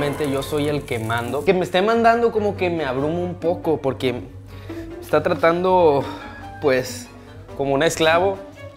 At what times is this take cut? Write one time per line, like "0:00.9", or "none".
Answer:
0:01.4